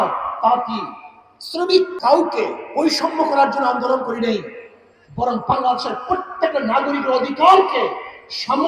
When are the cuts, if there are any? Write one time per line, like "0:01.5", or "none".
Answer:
0:01.9